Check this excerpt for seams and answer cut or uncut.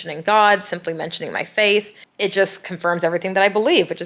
cut